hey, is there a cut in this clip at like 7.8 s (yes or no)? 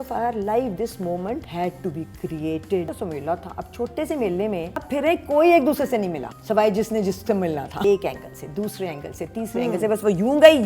yes